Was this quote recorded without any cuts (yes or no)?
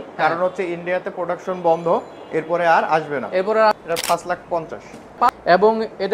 no